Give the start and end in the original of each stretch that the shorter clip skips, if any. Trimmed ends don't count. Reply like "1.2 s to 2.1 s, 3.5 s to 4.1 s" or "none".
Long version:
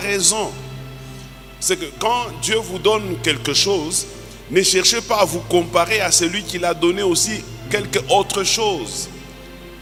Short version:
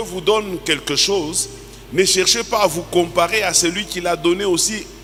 none